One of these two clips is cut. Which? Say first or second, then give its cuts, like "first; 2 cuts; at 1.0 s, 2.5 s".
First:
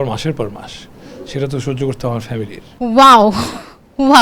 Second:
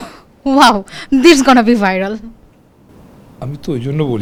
first; 1 cut; at 2.6 s